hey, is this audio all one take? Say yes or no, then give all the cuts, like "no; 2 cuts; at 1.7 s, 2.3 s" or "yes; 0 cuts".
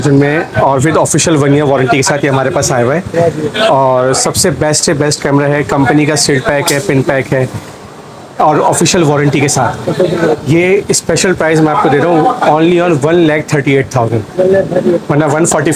yes; 0 cuts